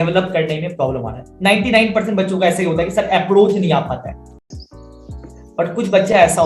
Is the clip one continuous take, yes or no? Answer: no